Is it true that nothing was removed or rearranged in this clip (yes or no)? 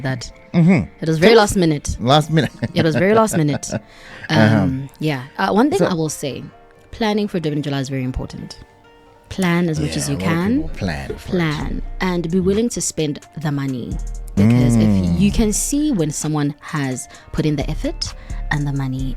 yes